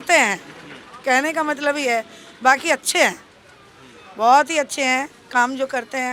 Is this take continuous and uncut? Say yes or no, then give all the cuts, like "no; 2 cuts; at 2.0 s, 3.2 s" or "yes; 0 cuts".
yes; 0 cuts